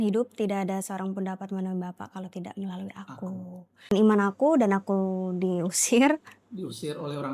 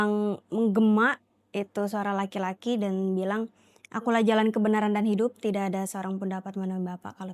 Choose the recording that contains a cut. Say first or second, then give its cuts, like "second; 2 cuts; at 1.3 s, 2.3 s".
first; 1 cut; at 3.9 s